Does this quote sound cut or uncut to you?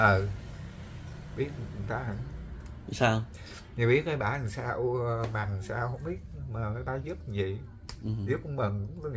uncut